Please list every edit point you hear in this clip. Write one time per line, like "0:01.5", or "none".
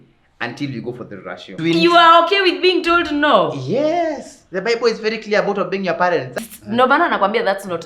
0:01.6
0:06.3